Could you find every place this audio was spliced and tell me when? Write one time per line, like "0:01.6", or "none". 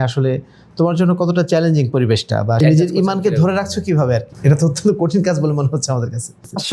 0:02.6
0:04.3